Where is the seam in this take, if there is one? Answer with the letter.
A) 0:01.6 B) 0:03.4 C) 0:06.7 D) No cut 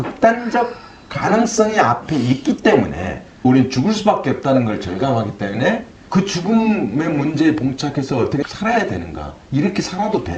B